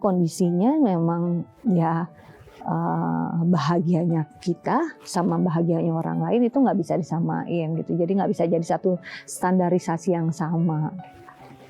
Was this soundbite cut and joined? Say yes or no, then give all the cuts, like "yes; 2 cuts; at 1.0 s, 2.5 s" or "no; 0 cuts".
no; 0 cuts